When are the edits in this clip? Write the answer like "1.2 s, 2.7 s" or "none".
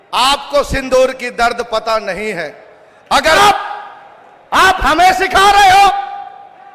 3.4 s